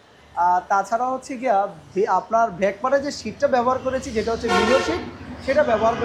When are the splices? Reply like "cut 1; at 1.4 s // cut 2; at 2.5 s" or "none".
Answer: none